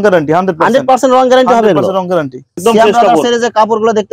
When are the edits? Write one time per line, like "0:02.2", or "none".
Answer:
0:02.6